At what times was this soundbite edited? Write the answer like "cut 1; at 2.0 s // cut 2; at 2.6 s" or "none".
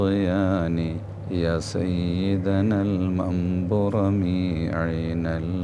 cut 1; at 1.1 s